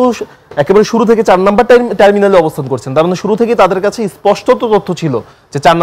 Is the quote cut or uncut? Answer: uncut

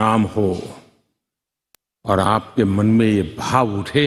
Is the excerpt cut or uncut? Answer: uncut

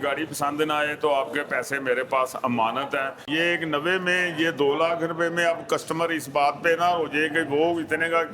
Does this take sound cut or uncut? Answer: cut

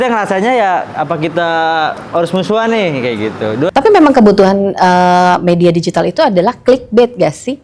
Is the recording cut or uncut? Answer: cut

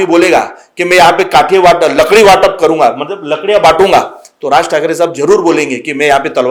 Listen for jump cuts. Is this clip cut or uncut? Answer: uncut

